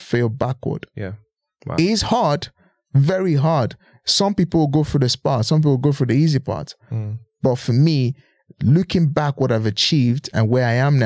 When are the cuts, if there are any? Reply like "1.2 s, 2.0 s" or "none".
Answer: none